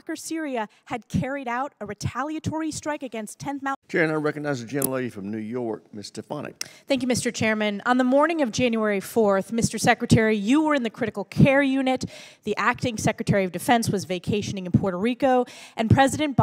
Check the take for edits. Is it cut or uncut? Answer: cut